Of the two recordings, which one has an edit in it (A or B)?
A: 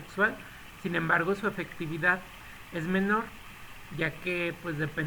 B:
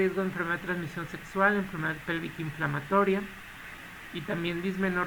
A